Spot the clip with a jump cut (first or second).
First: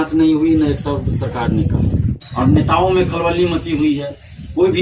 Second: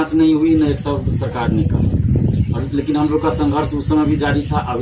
first